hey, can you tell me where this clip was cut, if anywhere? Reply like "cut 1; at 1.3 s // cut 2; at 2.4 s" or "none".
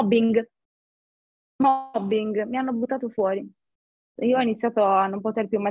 none

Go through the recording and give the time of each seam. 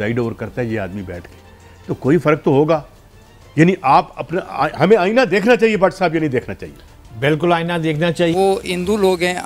cut 1; at 8.3 s

